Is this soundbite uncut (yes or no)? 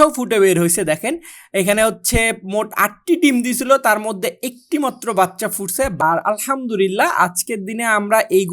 no